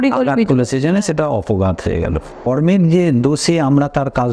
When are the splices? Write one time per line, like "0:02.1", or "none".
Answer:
0:02.5